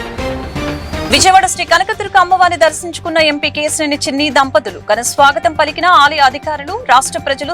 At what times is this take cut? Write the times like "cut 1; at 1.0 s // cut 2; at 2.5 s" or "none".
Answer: cut 1; at 1.0 s